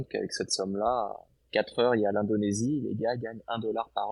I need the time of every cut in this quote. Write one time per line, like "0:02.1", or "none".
none